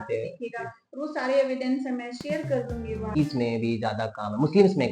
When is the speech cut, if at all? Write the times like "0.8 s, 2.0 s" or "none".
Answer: 3.2 s

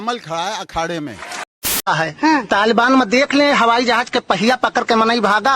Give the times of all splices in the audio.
1.9 s

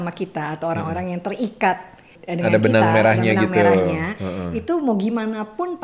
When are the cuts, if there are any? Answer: 2.2 s

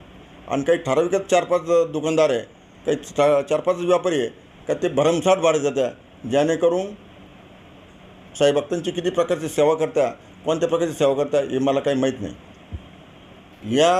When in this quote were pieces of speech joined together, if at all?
none

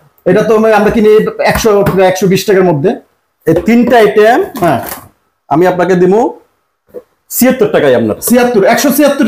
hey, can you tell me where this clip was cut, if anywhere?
none

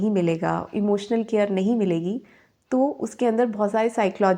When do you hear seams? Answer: none

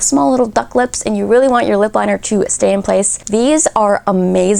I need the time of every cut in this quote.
none

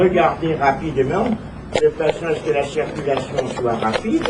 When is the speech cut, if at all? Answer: 1.6 s

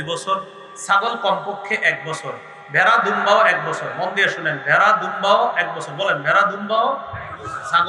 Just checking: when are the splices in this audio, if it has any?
none

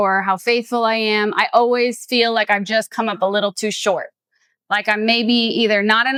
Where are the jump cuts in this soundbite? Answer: none

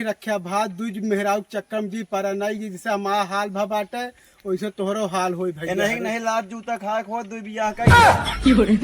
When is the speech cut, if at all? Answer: 7.9 s

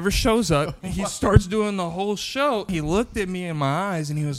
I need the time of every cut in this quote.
2.7 s

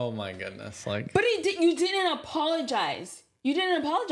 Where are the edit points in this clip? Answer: none

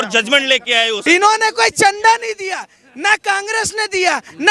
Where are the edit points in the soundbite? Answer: 1.0 s

